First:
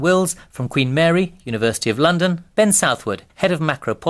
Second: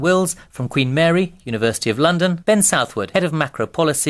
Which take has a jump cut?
first; 1 cut; at 2.4 s

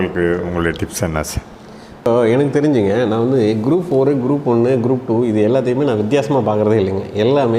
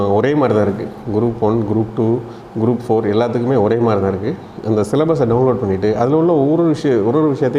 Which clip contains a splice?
first; 1 cut; at 2.1 s

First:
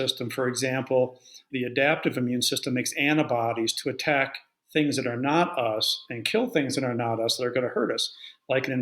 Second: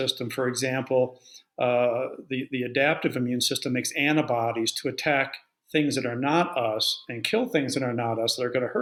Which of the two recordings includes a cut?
first; 1 cut; at 1.4 s

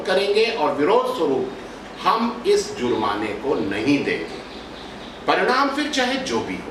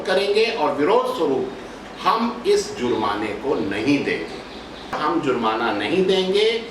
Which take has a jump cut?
second; 1 cut; at 5.0 s

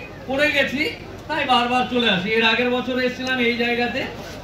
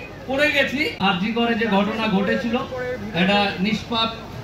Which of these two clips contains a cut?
second; 1 cut; at 0.9 s

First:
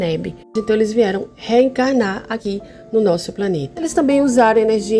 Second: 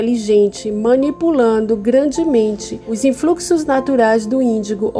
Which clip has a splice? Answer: first; 3 cuts; at 1.3 s, 2.4 s, 3.9 s

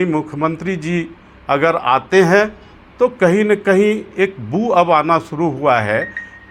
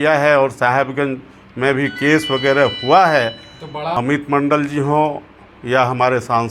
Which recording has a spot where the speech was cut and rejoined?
second; 1 cut; at 3.9 s

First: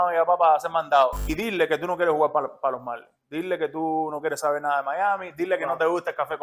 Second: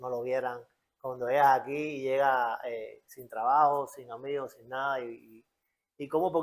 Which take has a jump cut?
first; 1 cut; at 1.2 s

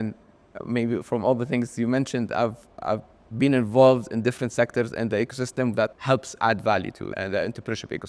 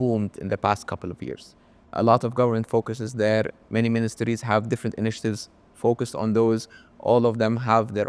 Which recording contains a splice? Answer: first; 2 cuts; at 6.0 s, 7.1 s

